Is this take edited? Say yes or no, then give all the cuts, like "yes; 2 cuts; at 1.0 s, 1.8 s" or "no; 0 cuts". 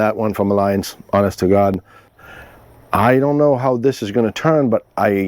yes; 1 cut; at 2.4 s